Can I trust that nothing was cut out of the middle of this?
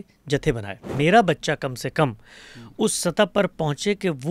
no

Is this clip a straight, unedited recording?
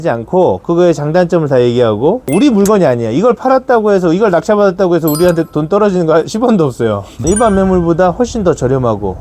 no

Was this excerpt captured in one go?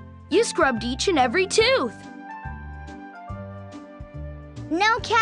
yes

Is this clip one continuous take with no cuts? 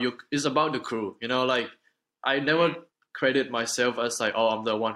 no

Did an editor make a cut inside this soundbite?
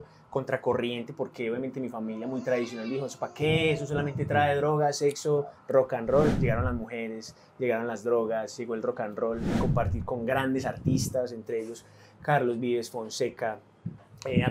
yes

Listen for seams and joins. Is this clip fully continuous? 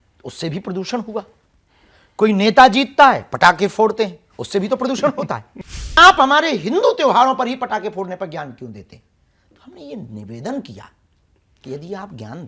no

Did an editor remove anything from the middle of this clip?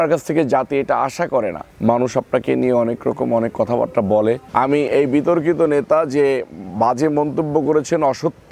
yes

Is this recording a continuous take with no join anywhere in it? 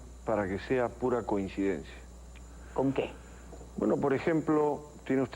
no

